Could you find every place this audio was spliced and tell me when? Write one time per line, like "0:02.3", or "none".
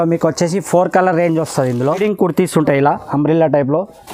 0:01.9